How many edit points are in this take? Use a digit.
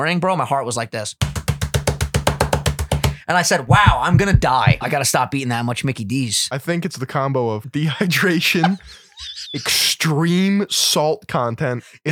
3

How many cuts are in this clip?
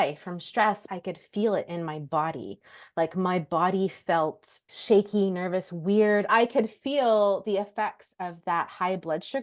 3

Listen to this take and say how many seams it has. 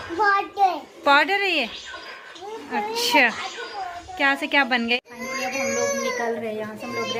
0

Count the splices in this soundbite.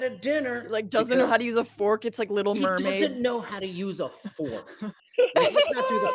1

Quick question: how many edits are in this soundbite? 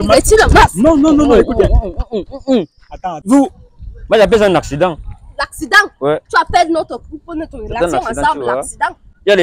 1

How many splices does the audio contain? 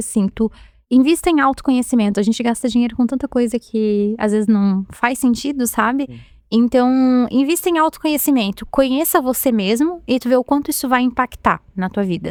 0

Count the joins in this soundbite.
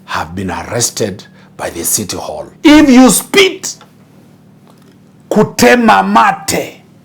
1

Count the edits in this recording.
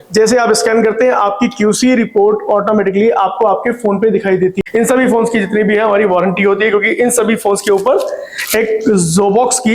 1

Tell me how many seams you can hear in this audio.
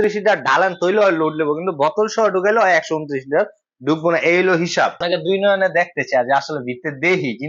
1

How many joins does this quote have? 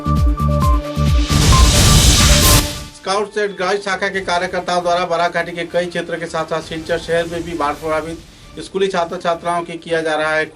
1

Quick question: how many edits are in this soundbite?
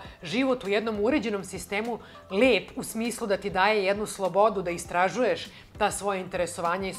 0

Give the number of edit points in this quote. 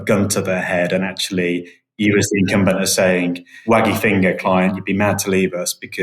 1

